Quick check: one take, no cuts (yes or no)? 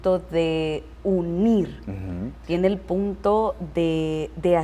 yes